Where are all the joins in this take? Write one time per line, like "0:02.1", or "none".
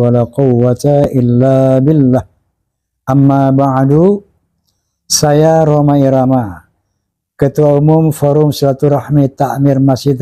none